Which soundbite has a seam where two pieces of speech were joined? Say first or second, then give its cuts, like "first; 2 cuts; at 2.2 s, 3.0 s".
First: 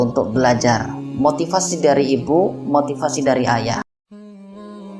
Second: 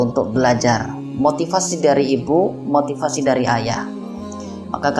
first; 1 cut; at 3.9 s